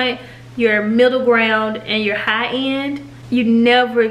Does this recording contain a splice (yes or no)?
yes